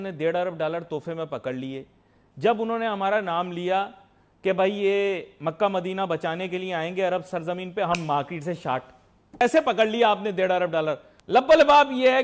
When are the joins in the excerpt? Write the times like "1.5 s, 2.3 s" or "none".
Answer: none